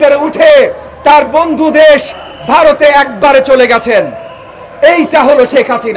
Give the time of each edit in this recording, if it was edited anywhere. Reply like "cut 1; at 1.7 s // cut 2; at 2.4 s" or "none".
none